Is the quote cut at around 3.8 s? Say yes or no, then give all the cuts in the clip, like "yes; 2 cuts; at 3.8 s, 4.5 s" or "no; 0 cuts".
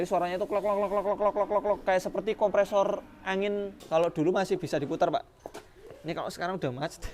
yes; 1 cut; at 3.8 s